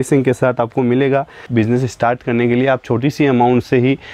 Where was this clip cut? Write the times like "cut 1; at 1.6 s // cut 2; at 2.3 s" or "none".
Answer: cut 1; at 1.4 s